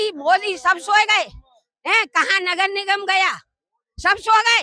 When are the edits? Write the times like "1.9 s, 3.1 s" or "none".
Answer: none